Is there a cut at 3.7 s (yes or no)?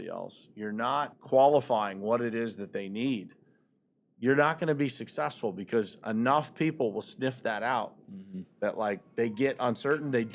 no